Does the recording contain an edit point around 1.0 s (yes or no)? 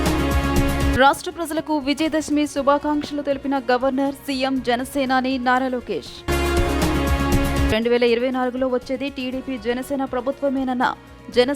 yes